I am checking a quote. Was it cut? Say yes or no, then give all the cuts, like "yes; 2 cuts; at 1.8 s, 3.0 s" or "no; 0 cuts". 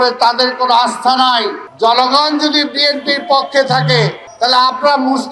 yes; 2 cuts; at 1.6 s, 4.2 s